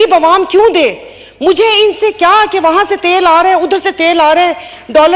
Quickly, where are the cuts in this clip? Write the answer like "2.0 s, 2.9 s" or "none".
none